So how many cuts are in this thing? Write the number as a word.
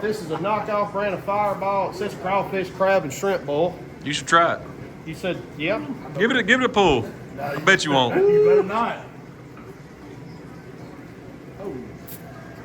one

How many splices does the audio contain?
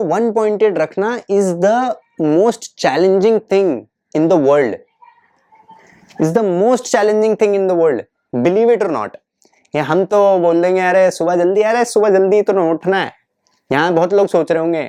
zero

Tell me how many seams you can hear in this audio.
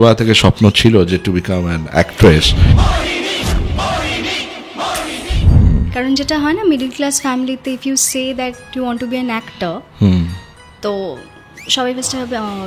two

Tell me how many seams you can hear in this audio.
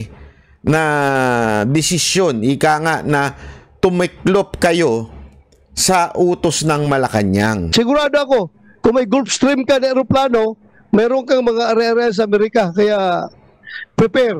one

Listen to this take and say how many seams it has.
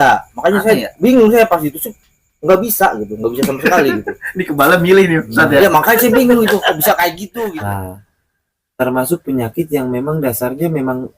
one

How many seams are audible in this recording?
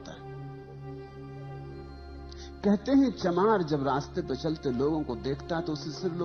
zero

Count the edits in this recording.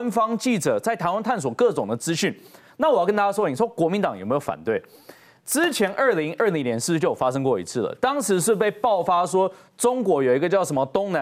zero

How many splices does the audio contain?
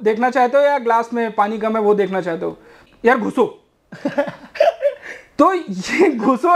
one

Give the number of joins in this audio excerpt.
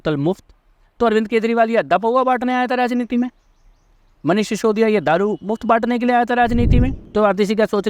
one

